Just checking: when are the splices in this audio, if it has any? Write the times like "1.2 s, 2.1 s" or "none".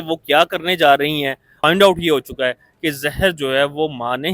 1.5 s